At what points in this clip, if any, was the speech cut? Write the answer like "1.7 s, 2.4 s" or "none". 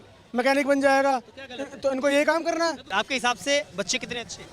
2.8 s

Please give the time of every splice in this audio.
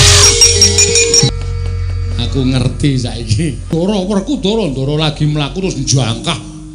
1.3 s, 3.7 s

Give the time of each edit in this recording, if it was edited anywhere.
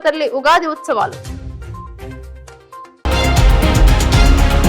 2.9 s

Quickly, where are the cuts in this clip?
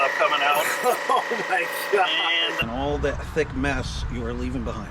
2.5 s

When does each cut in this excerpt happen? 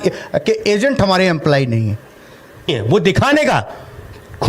2.7 s

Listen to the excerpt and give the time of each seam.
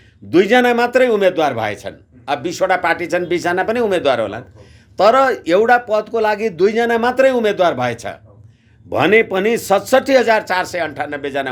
none

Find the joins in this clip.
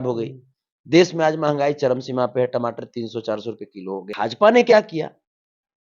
4.1 s

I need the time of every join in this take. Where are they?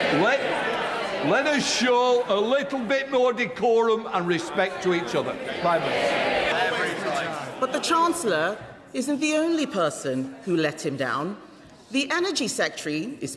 6.5 s

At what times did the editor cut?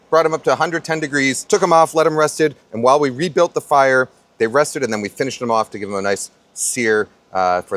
none

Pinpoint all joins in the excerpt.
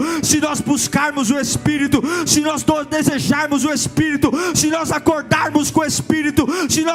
none

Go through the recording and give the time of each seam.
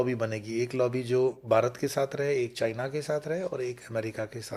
none

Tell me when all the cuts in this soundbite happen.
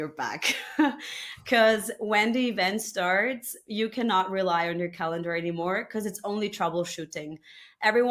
none

